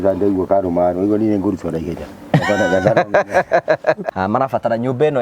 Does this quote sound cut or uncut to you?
cut